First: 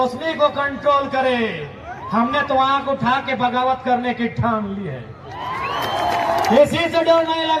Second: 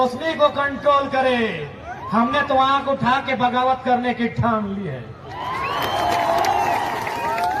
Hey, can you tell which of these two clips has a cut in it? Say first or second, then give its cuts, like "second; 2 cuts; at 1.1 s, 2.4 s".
first; 1 cut; at 6.5 s